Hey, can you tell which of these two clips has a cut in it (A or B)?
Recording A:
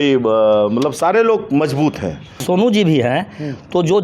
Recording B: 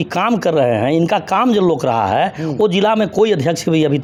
A